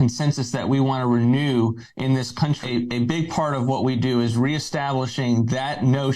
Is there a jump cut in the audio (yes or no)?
yes